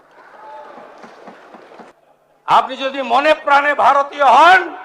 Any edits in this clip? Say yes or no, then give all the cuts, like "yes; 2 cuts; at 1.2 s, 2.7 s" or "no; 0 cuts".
yes; 1 cut; at 1.9 s